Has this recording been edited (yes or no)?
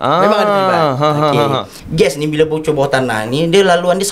yes